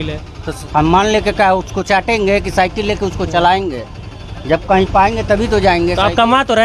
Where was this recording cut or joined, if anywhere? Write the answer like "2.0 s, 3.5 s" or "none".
none